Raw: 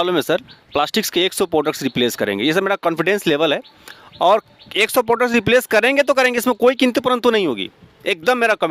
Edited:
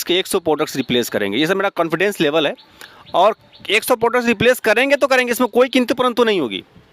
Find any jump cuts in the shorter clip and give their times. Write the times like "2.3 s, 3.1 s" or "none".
none